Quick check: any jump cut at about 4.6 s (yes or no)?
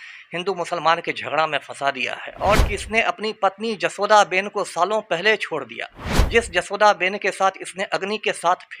no